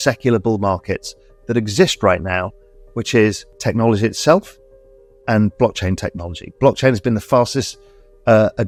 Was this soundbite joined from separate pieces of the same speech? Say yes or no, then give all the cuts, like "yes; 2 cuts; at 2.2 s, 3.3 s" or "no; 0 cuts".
no; 0 cuts